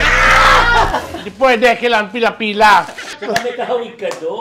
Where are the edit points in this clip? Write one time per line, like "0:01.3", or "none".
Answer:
0:03.2